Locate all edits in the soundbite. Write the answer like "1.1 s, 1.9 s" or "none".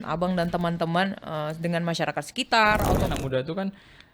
3.1 s

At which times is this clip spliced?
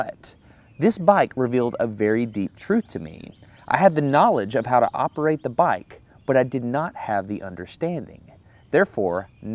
7.1 s

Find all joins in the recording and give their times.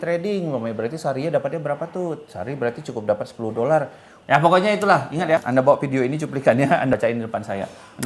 4.3 s, 5.4 s, 6.9 s

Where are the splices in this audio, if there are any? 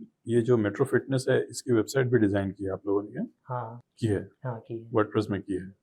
3.8 s

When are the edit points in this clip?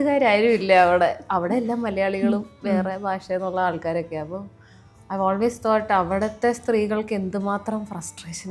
none

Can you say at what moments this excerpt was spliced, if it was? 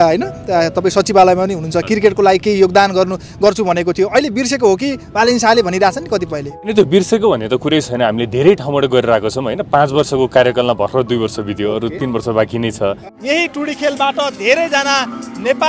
6.7 s, 13.0 s

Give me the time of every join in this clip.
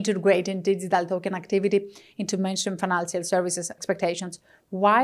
3.7 s

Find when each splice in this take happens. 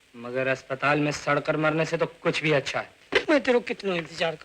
3.0 s

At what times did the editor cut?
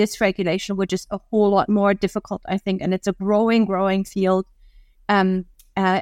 none

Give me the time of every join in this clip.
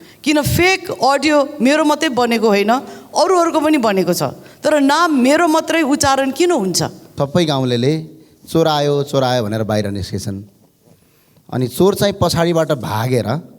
7.0 s

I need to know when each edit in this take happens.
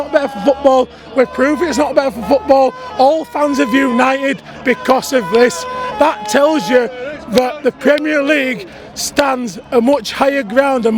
none

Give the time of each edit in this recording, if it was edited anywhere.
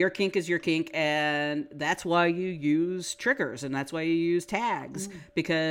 none

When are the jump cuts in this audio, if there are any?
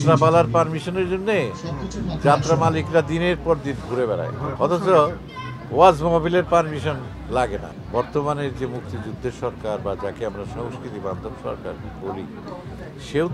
4.5 s, 7.7 s

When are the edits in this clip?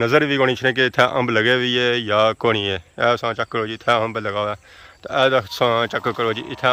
none

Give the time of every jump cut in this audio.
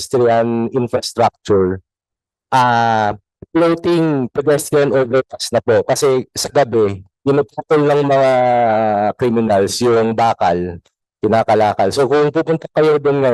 none

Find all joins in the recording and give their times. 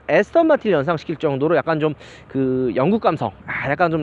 none

